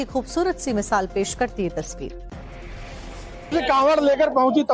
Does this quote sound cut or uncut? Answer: cut